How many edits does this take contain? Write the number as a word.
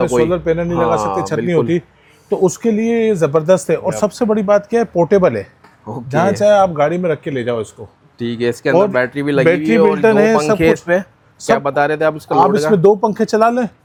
zero